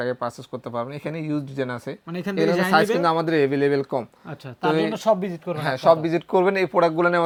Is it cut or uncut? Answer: uncut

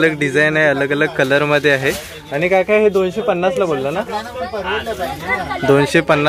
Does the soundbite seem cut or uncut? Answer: uncut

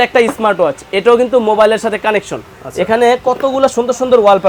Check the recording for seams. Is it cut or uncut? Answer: uncut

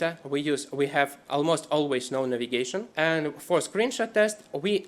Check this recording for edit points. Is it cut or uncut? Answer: cut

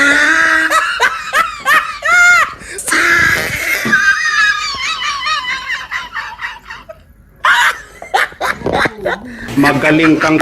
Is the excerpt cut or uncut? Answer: cut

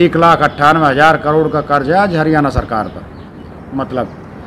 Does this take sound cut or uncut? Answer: cut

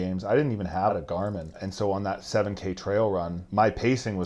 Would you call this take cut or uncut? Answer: cut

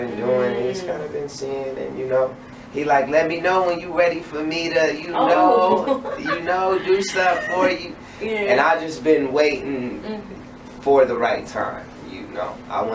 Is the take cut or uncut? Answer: uncut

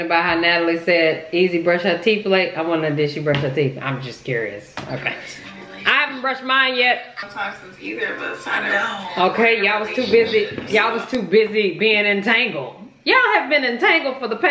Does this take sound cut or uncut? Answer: cut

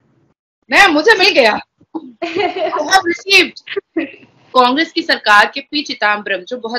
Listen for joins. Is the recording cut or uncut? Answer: cut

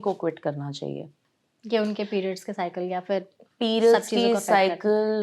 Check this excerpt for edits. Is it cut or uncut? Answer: uncut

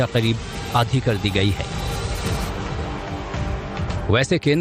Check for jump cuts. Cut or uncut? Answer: cut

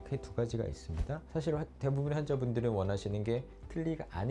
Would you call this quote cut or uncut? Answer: cut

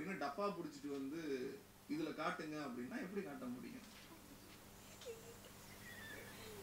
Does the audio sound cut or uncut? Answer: uncut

